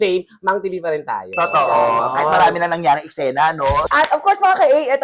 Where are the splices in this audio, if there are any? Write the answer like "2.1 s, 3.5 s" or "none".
3.8 s